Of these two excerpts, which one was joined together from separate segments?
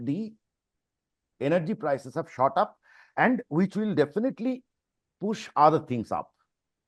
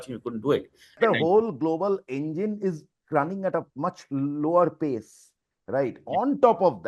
second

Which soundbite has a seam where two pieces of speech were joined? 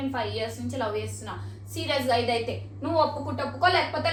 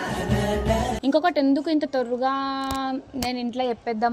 second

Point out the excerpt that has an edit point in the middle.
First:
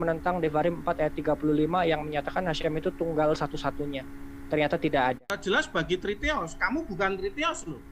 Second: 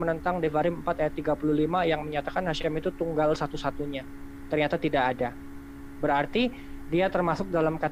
first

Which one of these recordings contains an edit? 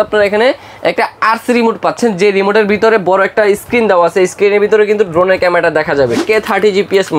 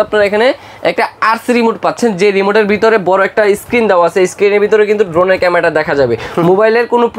first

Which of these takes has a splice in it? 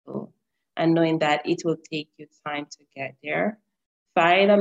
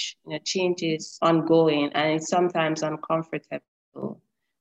second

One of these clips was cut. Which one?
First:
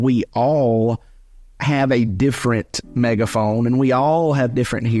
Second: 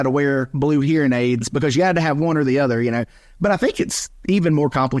second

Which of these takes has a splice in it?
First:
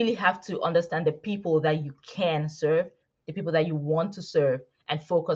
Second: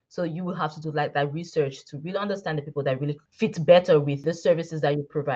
second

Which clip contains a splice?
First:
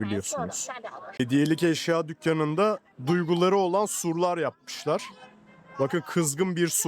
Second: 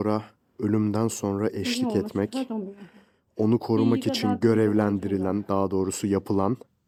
first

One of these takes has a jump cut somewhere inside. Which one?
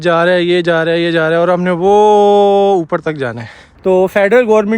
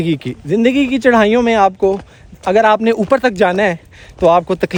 first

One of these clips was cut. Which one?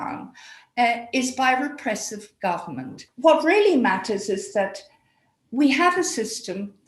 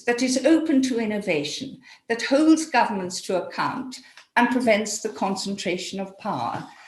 first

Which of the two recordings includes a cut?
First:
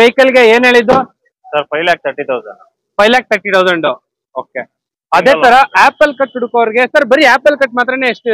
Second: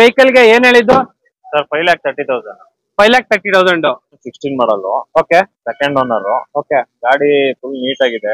second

